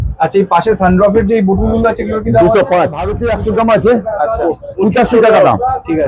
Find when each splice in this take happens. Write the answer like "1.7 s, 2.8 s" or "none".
3.1 s